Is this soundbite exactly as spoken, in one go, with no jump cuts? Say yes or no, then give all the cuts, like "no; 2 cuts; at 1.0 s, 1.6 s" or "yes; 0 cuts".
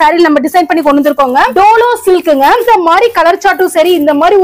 no; 2 cuts; at 1.5 s, 2.6 s